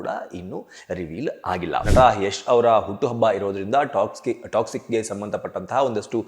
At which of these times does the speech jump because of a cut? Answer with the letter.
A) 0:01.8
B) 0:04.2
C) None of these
A